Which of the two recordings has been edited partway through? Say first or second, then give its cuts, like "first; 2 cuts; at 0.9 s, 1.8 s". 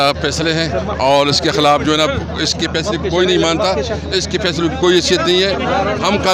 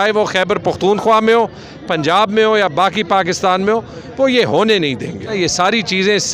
second; 1 cut; at 5.3 s